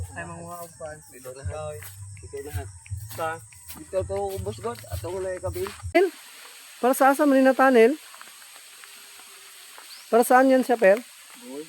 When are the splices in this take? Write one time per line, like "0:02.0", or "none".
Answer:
0:06.0

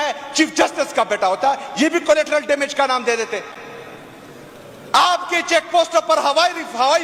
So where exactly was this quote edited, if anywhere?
none

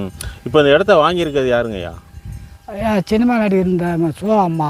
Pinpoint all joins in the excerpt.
none

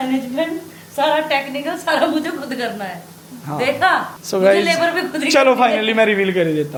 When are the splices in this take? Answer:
none

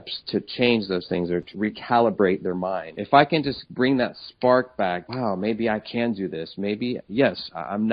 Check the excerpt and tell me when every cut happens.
0:01.5
0:02.9
0:03.6
0:05.0

